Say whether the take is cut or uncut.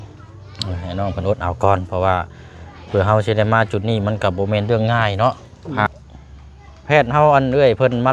cut